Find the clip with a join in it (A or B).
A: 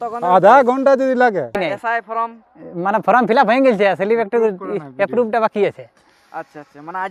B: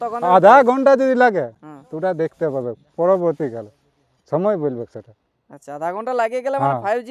A